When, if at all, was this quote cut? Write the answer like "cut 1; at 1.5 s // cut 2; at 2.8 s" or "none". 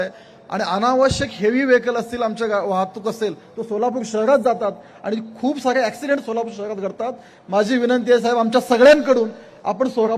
none